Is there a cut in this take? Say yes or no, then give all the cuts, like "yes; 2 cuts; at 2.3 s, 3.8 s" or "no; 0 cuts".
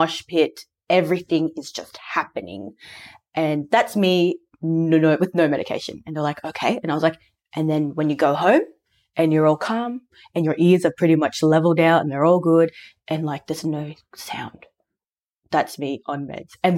no; 0 cuts